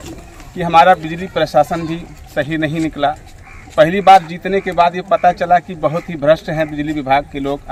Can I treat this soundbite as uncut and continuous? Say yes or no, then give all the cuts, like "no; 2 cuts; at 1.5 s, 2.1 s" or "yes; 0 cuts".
yes; 0 cuts